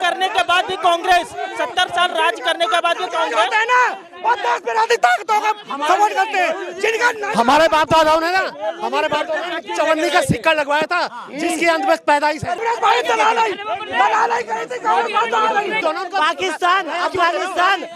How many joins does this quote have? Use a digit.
2